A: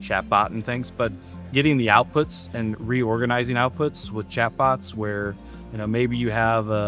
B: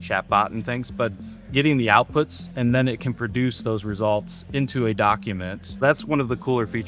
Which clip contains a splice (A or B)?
B